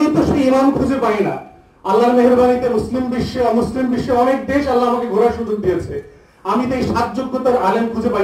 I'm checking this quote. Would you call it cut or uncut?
uncut